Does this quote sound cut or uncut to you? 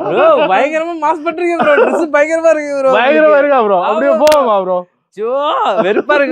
uncut